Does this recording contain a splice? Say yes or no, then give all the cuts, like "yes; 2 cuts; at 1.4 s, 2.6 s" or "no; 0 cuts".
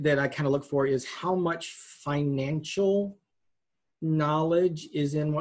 no; 0 cuts